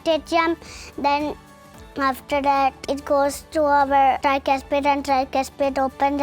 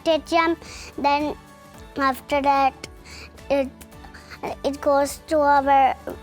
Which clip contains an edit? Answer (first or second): first